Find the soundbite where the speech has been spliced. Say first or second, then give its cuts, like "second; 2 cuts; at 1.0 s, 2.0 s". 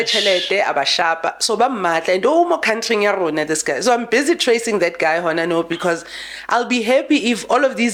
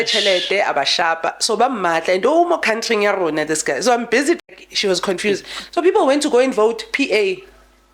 second; 1 cut; at 4.5 s